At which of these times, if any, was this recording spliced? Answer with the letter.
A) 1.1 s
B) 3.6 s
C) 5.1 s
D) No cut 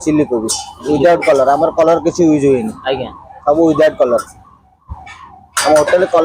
D